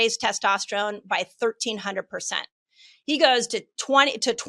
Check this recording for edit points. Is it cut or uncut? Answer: cut